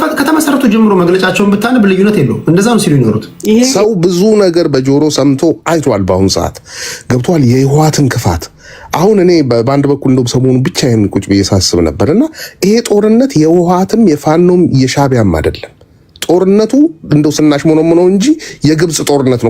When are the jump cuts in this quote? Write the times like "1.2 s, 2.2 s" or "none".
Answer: 3.7 s